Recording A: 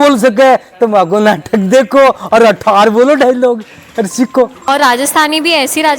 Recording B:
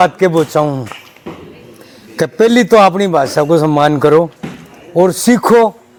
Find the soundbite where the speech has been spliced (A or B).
A